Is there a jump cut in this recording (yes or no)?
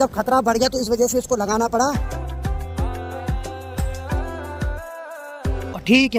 no